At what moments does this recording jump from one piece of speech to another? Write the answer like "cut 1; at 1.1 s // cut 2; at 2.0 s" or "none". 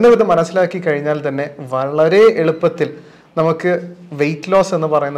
none

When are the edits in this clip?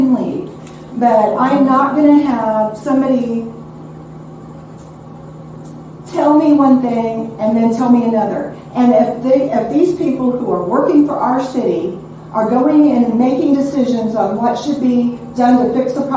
none

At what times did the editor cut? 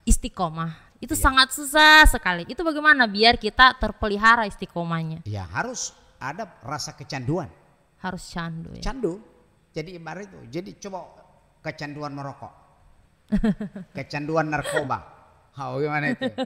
none

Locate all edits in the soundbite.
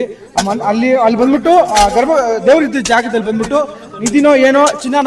none

